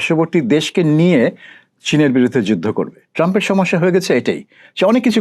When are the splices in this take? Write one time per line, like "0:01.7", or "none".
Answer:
0:03.1